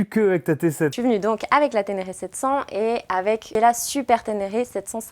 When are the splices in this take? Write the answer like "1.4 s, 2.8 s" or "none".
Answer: 1.0 s, 3.5 s